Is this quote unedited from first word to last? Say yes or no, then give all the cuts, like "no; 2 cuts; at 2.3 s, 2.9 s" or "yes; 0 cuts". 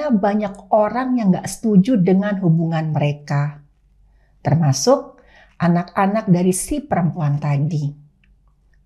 yes; 0 cuts